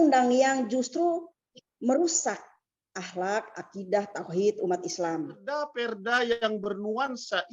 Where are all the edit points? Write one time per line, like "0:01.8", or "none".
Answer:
0:05.7